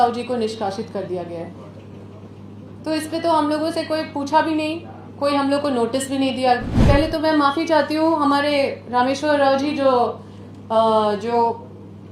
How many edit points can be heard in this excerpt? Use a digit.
1